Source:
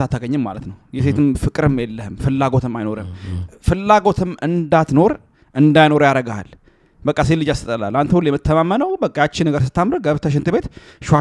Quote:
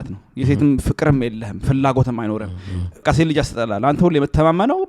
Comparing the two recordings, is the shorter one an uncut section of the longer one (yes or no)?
no